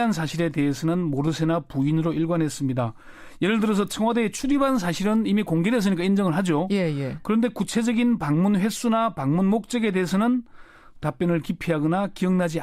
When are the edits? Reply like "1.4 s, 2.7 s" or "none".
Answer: none